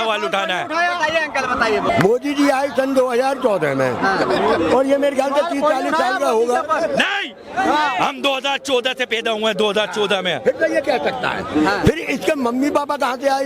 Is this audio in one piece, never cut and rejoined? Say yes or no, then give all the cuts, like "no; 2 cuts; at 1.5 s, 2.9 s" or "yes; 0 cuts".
no; 1 cut; at 1.9 s